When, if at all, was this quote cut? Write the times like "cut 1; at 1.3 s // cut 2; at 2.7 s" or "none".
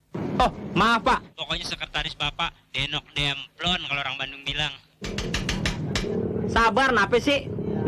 cut 1; at 1.4 s // cut 2; at 5.2 s